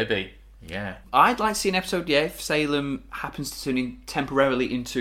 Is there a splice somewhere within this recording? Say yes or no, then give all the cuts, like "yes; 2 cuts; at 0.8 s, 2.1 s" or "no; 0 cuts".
yes; 1 cut; at 1.0 s